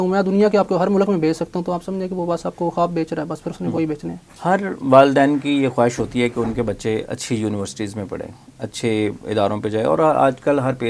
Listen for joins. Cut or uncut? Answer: uncut